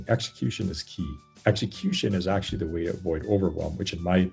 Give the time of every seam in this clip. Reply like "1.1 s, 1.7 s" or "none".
1.2 s